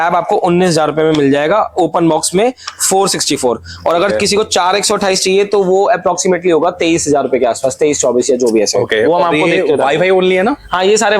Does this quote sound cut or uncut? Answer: uncut